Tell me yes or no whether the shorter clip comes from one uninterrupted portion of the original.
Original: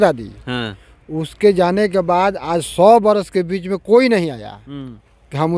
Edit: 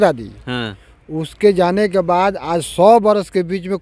yes